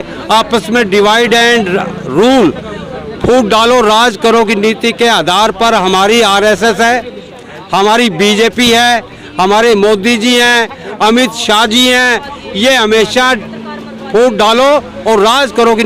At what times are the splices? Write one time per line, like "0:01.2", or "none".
none